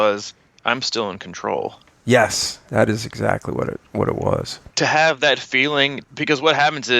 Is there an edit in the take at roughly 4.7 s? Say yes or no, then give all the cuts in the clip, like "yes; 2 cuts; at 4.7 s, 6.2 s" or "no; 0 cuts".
yes; 2 cuts; at 4.7 s, 6.0 s